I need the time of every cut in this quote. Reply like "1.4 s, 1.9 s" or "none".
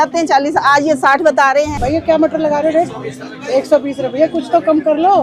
1.7 s

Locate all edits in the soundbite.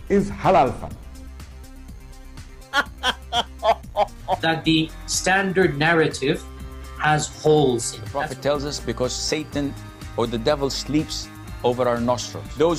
none

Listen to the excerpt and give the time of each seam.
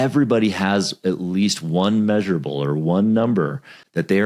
none

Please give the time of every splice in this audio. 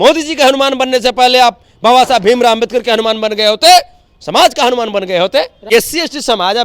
5.7 s

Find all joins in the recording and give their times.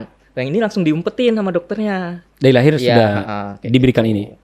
2.2 s

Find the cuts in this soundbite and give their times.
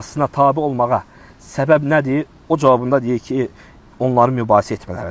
none

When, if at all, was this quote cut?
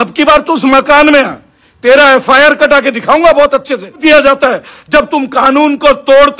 4.0 s

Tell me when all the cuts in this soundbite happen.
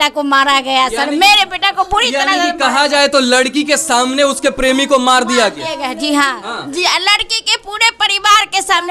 none

